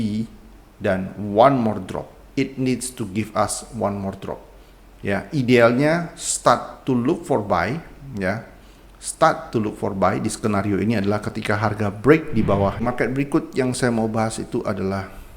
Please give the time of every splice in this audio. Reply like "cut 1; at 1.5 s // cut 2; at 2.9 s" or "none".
cut 1; at 12.8 s

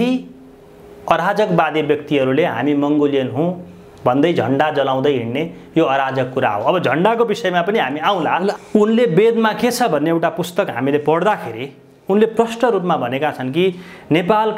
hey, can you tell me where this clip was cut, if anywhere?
cut 1; at 8.6 s

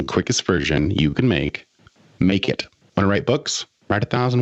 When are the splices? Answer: cut 1; at 2.7 s

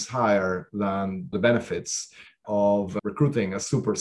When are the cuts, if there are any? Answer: cut 1; at 1.3 s // cut 2; at 3.0 s

